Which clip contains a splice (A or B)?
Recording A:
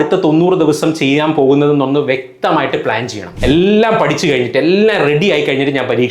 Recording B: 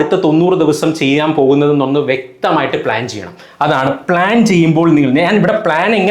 A